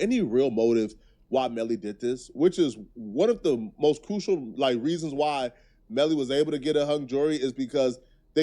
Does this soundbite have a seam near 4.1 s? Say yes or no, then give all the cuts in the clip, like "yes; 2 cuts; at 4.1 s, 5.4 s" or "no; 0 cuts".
yes; 1 cut; at 4.1 s